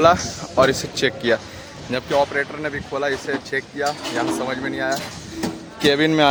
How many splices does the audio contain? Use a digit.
0